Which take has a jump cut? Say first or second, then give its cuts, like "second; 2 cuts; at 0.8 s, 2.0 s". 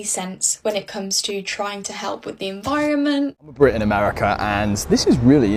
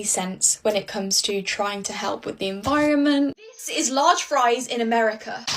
second; 1 cut; at 3.4 s